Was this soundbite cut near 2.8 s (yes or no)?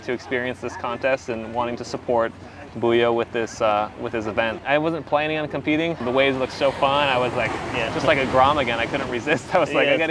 no